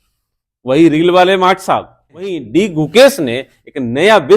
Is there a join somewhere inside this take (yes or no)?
yes